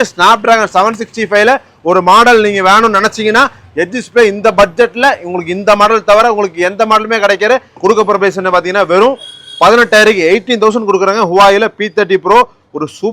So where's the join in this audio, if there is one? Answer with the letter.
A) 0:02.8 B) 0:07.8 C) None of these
B